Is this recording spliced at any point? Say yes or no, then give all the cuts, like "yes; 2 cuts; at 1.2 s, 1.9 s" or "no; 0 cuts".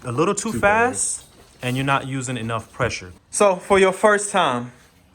yes; 1 cut; at 3.1 s